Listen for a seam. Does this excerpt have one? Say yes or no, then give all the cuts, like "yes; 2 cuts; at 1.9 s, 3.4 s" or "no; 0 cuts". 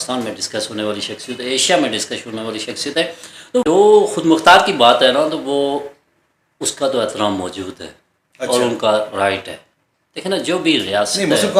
yes; 1 cut; at 3.5 s